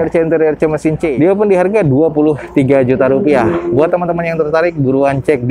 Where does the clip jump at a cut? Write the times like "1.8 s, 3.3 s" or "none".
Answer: 1.1 s